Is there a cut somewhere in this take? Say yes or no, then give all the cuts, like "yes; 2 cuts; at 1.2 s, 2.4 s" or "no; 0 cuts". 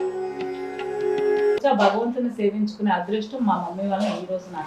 yes; 1 cut; at 1.6 s